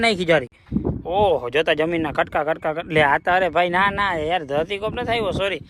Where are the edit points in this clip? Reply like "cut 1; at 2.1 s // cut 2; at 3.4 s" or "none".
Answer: none

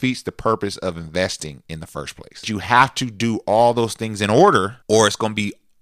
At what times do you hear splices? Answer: cut 1; at 2.5 s // cut 2; at 4.8 s

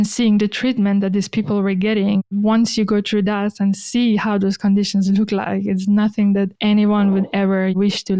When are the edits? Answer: cut 1; at 2.3 s

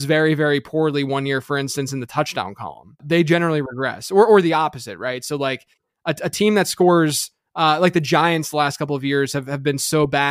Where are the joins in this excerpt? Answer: cut 1; at 3.0 s

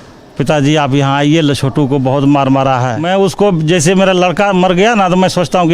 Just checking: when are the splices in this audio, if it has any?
cut 1; at 3.0 s

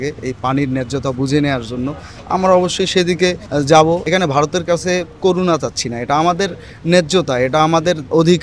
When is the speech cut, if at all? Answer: cut 1; at 3.4 s // cut 2; at 4.0 s

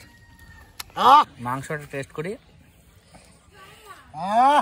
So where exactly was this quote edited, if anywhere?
cut 1; at 1.3 s

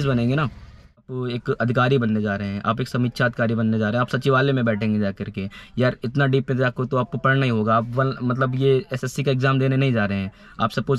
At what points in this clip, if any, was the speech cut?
cut 1; at 1.0 s

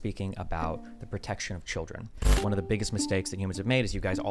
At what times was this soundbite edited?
cut 1; at 2.3 s

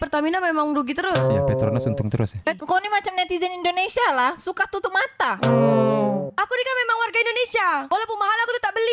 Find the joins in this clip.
cut 1; at 2.6 s

